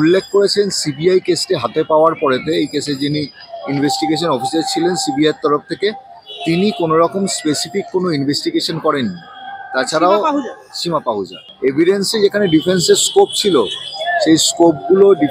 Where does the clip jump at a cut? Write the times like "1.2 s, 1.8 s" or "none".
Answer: 11.4 s